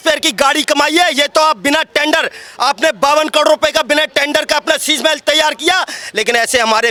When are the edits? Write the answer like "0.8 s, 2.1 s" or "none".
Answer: none